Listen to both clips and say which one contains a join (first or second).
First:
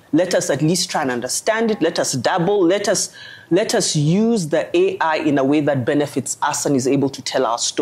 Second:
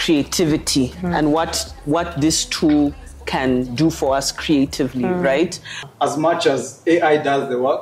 second